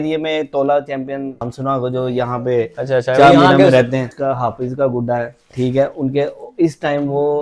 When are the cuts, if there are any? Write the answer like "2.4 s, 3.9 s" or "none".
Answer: 1.5 s, 4.1 s